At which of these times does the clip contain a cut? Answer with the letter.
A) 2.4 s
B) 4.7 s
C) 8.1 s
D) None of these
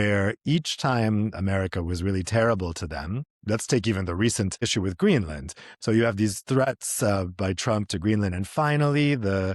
B